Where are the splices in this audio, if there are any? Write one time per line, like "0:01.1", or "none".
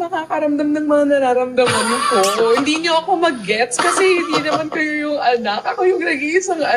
none